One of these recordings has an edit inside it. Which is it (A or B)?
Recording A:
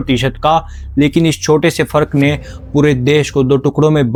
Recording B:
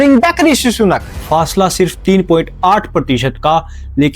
B